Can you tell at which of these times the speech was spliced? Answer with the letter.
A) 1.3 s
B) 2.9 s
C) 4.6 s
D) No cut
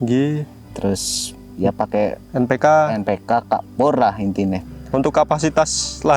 C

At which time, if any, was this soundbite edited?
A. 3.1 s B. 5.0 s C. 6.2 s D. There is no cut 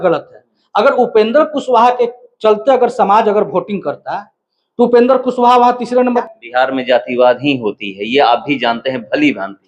C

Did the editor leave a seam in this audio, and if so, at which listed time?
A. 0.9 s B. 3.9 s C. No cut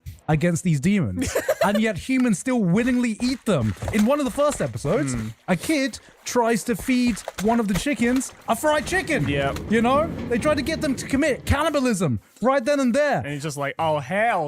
B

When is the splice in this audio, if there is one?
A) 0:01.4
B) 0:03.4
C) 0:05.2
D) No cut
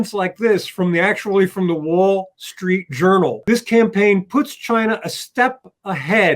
B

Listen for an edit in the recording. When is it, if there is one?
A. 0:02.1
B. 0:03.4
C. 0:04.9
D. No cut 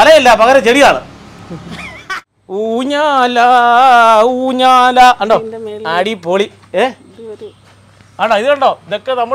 A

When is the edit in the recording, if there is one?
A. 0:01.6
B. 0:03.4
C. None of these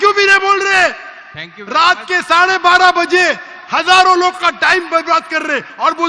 C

